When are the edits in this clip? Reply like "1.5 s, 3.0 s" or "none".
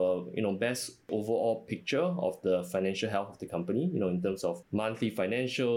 1.1 s, 4.6 s